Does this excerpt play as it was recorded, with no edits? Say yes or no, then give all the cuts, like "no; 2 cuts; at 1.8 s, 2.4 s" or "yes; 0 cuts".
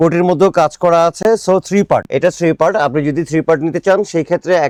yes; 0 cuts